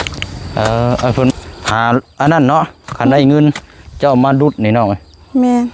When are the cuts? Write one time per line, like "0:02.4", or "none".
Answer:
0:01.3